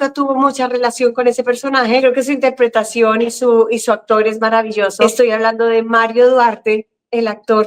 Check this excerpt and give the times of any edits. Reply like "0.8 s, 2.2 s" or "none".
2.0 s, 4.9 s